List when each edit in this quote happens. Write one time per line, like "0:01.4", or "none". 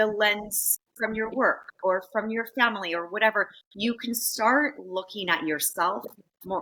none